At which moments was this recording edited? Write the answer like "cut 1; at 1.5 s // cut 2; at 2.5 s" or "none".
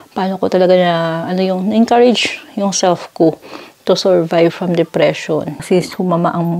cut 1; at 5.5 s